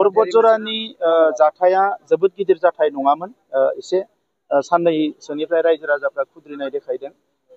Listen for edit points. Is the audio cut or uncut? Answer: uncut